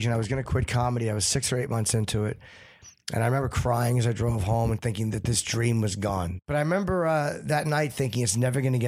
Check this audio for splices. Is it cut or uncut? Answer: cut